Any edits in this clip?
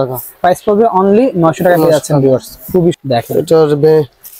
yes; 1 cut; at 3.0 s

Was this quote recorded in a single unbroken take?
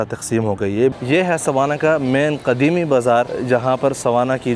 no; 2 cuts; at 0.9 s, 3.3 s

